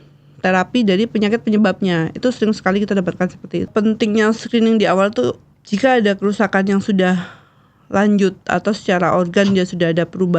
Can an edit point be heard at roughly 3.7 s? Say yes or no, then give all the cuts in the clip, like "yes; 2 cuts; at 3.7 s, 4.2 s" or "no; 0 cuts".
yes; 2 cuts; at 3.7 s, 5.5 s